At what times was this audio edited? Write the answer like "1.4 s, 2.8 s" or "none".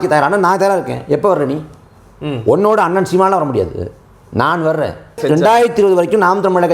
5.2 s